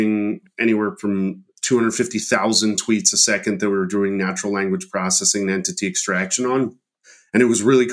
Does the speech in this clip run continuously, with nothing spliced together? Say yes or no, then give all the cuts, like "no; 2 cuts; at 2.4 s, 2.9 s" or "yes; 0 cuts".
yes; 0 cuts